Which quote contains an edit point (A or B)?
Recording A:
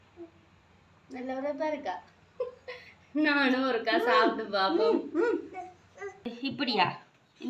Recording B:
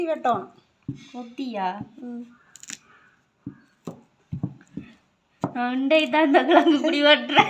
A